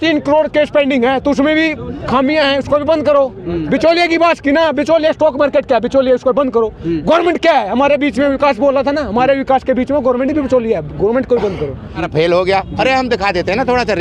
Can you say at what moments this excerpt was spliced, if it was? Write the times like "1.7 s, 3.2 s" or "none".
12.0 s